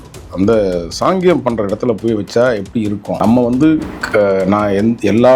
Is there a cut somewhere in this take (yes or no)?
yes